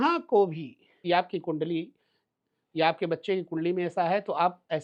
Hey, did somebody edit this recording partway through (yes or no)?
yes